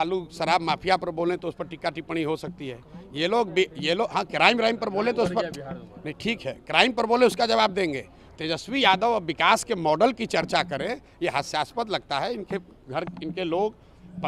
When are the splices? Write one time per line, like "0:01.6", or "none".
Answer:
none